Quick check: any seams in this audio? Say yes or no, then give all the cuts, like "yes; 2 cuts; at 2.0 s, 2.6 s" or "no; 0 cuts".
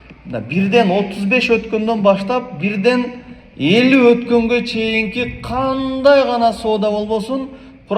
no; 0 cuts